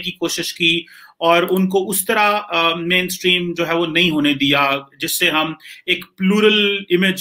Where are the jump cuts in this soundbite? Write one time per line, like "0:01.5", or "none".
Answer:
none